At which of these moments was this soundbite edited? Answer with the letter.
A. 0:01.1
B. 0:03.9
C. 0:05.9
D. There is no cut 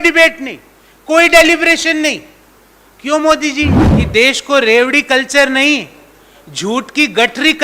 B